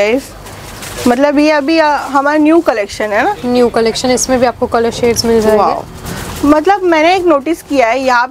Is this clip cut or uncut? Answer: uncut